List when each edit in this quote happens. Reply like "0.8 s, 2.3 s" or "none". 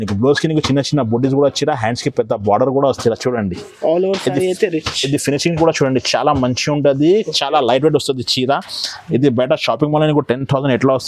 none